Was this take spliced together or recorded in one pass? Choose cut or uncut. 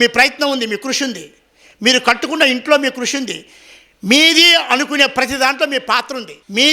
uncut